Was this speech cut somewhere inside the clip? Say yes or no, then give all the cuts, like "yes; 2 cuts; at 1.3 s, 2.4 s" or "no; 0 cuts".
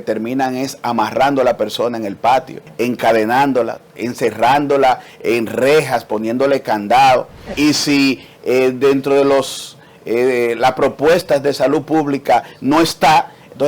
yes; 2 cuts; at 2.6 s, 7.4 s